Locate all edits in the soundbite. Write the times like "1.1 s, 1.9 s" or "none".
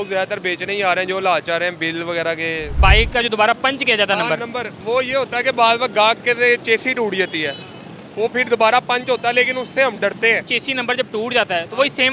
2.8 s, 10.6 s